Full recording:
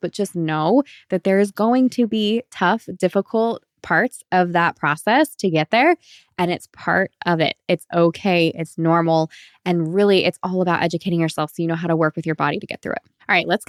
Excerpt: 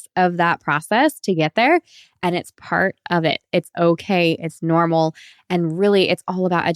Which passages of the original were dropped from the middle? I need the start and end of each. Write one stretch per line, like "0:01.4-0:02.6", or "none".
none